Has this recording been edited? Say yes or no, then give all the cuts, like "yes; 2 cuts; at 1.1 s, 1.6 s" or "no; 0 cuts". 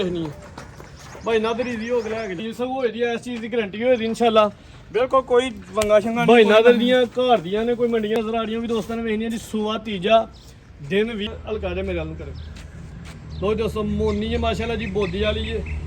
yes; 3 cuts; at 2.4 s, 8.2 s, 11.3 s